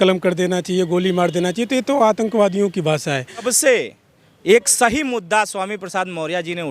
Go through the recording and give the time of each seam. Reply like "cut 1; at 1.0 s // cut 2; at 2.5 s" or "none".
cut 1; at 3.5 s